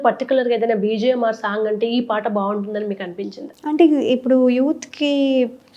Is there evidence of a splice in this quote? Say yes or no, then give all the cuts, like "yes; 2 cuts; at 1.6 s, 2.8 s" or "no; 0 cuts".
no; 0 cuts